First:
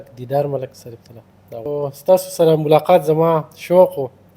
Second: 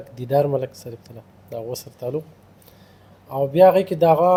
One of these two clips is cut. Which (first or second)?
first